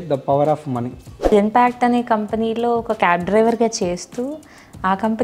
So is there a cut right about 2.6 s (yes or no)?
no